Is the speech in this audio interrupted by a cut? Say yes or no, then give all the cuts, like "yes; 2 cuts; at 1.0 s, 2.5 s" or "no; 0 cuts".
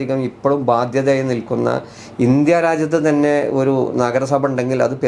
no; 0 cuts